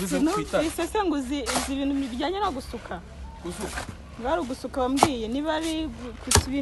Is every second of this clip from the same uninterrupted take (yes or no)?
yes